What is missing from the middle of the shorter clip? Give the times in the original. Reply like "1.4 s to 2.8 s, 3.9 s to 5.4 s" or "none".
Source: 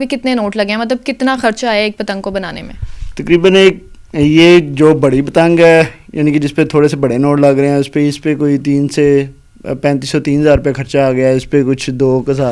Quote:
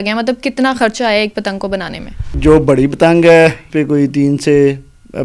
3.0 s to 4.7 s, 6.0 s to 8.2 s